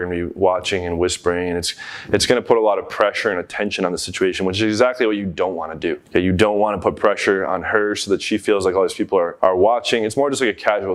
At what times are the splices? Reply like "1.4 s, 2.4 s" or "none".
none